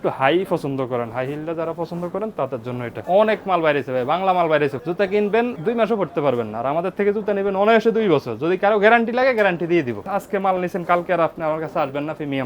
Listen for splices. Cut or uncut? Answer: cut